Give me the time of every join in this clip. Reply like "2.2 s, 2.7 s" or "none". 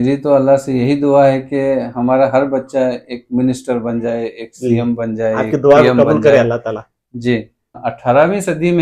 7.8 s